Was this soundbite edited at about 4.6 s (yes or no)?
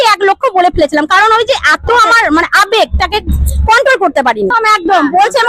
yes